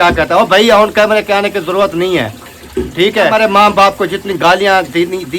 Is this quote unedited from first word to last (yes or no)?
no